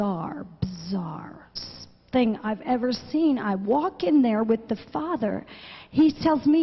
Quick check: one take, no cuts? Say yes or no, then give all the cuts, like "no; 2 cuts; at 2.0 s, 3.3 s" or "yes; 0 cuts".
yes; 0 cuts